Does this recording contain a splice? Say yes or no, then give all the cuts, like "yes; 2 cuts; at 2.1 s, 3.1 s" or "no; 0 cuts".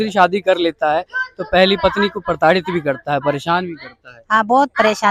no; 0 cuts